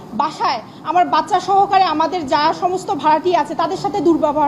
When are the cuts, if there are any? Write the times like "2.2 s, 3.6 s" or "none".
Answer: none